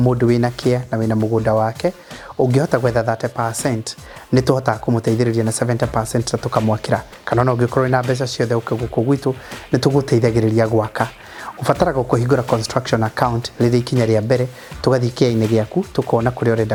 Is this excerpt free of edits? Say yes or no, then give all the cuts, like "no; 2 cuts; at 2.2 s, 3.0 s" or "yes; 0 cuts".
yes; 0 cuts